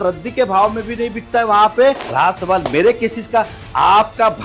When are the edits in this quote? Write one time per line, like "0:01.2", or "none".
0:02.0